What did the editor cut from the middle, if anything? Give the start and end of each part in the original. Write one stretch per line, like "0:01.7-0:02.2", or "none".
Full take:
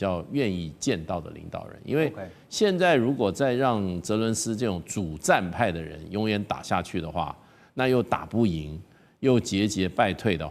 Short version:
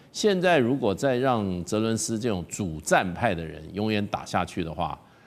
none

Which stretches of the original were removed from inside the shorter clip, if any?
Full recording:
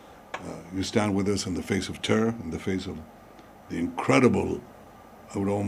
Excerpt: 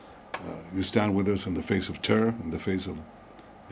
none

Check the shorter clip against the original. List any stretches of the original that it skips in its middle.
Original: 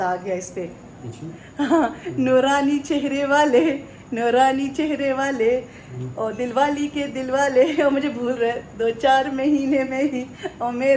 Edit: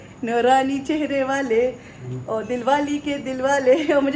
none

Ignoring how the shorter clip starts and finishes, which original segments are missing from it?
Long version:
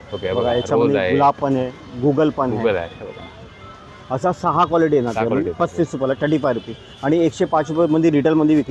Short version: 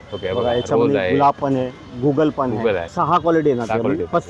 0:02.9-0:04.4

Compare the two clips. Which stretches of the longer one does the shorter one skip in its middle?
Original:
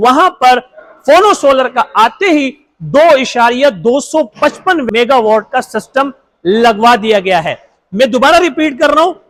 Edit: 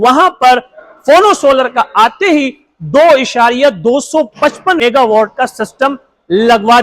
0:04.8-0:04.9

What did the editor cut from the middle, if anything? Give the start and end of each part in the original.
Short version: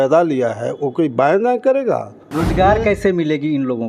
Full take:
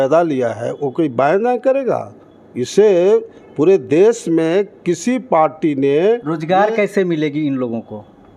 0:02.4-0:06.3

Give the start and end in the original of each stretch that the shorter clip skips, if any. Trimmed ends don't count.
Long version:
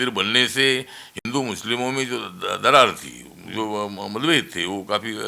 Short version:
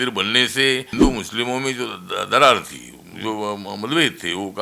0:00.9-0:01.2

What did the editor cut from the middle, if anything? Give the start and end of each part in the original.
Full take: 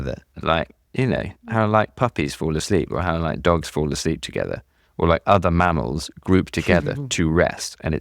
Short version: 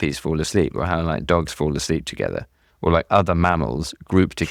none

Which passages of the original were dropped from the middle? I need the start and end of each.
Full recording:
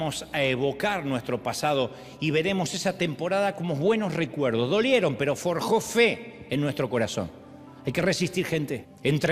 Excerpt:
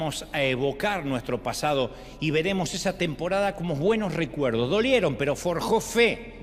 none

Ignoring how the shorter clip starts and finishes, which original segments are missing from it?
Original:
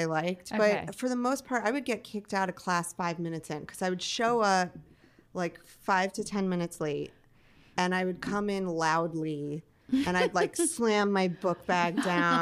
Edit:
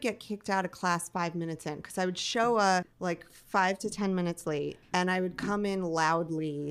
0:04.8-0:05.3
0:07.1-0:07.6

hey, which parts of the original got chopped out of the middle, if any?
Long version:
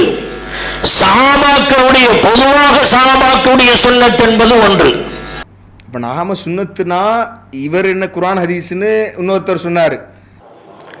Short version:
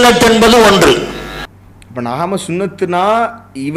none

